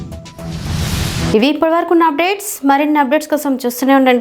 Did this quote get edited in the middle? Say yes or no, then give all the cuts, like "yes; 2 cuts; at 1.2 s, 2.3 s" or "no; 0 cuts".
no; 0 cuts